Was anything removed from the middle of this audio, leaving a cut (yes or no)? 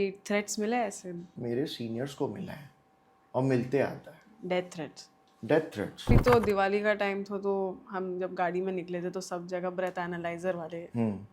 yes